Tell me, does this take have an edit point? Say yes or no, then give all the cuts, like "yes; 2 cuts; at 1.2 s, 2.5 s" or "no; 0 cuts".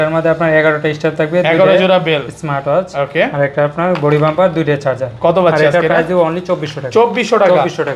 no; 0 cuts